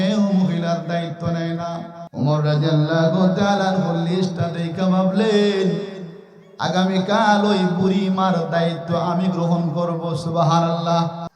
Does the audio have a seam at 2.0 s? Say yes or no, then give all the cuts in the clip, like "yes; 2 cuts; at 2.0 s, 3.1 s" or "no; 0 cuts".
yes; 1 cut; at 2.0 s